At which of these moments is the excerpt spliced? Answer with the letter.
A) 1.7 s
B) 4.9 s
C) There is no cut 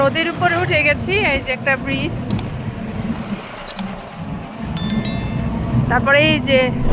C